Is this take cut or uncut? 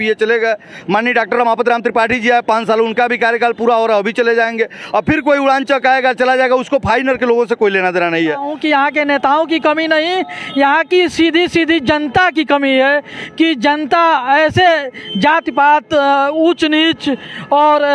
cut